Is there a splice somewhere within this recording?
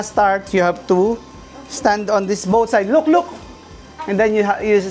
no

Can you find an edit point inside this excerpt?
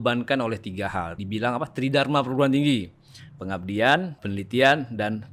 yes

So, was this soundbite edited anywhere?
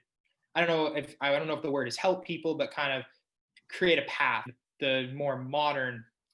yes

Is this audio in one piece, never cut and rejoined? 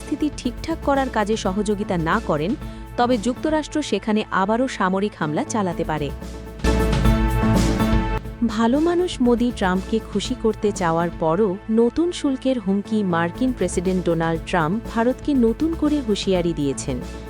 no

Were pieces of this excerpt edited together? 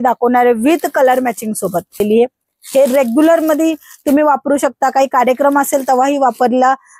yes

